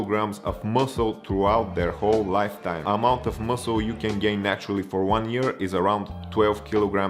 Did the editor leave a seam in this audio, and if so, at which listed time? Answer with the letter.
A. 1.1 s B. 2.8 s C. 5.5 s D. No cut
B